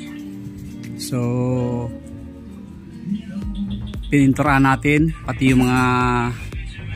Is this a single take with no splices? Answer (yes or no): yes